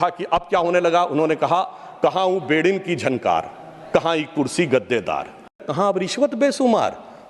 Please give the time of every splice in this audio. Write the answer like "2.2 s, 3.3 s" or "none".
5.6 s

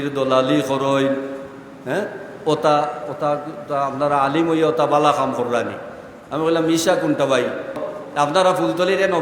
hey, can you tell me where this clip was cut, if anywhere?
8.0 s

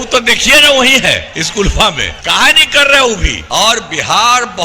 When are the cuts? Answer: 1.3 s, 2.1 s, 3.3 s

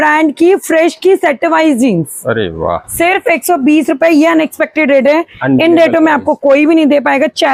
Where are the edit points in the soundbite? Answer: none

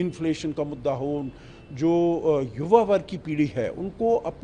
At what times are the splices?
none

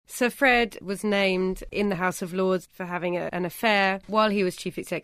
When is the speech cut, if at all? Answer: 0.8 s, 1.7 s, 3.8 s

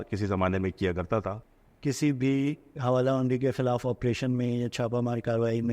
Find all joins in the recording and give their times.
1.4 s

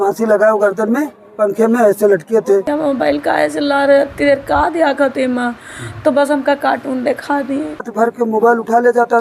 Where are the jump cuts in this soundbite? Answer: 2.7 s, 7.9 s

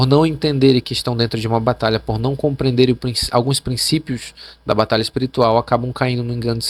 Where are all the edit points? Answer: none

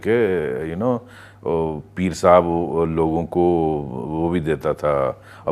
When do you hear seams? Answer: none

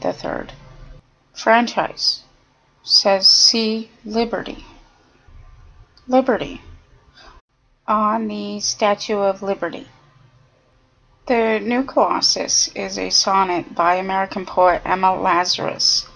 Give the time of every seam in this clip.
none

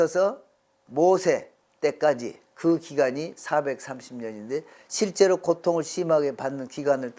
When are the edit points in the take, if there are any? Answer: none

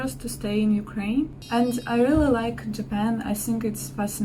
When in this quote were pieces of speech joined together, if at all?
1.4 s

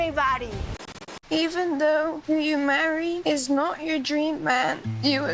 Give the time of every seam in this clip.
0.9 s

